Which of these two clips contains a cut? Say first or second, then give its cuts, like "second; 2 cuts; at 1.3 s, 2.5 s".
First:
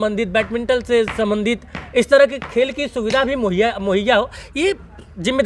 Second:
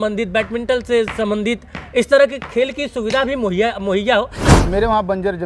second; 1 cut; at 4.5 s